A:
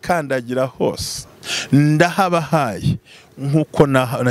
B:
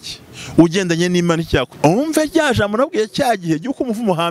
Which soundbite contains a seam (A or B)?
B